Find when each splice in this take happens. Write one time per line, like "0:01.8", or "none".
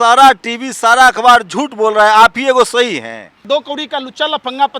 0:03.5